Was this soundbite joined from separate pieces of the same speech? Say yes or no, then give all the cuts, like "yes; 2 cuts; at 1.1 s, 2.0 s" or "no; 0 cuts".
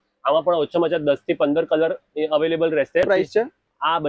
yes; 1 cut; at 3.1 s